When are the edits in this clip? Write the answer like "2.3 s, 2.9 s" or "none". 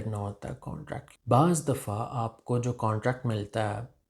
1.0 s